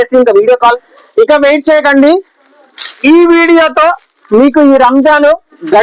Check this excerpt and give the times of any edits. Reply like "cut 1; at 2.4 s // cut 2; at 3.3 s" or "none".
cut 1; at 0.9 s